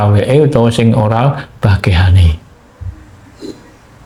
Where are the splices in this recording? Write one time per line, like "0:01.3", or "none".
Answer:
none